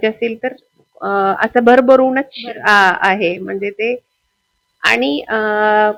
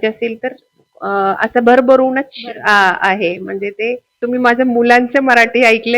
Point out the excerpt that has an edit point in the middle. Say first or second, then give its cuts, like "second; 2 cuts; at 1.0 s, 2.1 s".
second; 1 cut; at 4.1 s